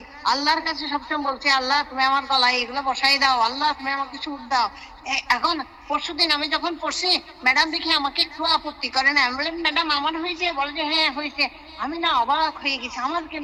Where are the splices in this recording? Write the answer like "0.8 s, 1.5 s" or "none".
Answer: none